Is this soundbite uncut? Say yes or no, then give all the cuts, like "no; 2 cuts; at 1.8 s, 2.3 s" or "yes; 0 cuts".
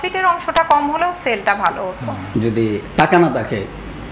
no; 1 cut; at 2.2 s